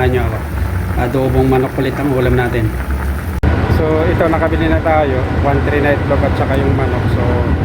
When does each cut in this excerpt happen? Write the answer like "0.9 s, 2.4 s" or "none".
3.3 s